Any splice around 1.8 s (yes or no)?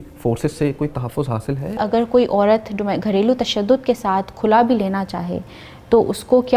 yes